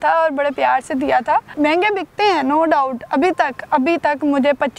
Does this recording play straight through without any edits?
no; 1 cut; at 1.5 s

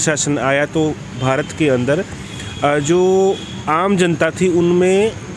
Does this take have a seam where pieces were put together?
no; 0 cuts

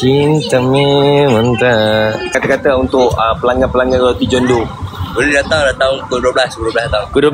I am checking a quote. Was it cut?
yes; 1 cut; at 2.4 s

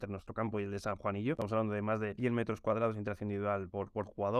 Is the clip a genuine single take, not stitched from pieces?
yes; 0 cuts

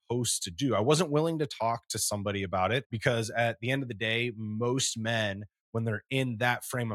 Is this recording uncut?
no; 1 cut; at 2.9 s

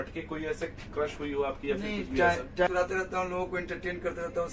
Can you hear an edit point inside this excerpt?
yes; 1 cut; at 2.7 s

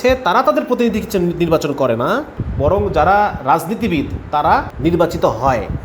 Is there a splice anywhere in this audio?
yes; 2 cuts; at 2.4 s, 4.7 s

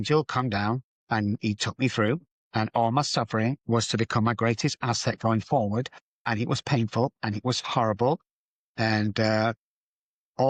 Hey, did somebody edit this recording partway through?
yes; 3 cuts; at 1.0 s, 3.6 s, 6.3 s

